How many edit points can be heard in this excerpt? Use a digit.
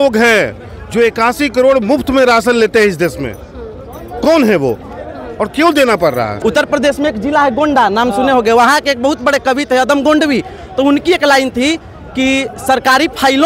1